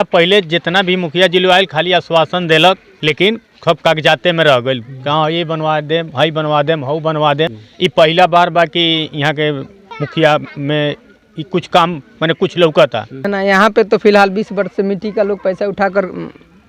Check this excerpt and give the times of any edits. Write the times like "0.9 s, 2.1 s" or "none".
2.9 s, 7.6 s, 9.8 s, 13.2 s